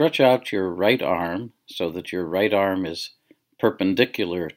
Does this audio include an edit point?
yes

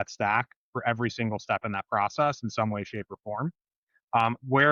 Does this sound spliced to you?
no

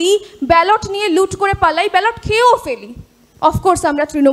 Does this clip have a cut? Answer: no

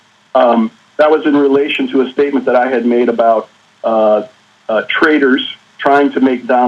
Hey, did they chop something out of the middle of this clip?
no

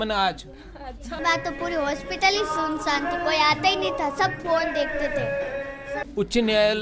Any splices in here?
yes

